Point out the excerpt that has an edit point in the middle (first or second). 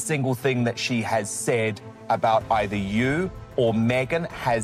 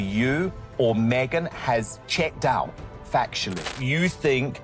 second